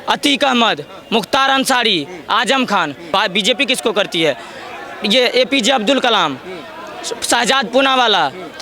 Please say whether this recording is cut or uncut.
cut